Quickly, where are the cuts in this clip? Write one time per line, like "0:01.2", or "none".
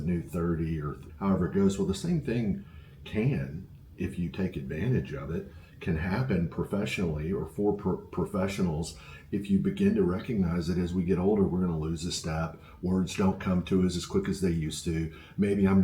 0:01.0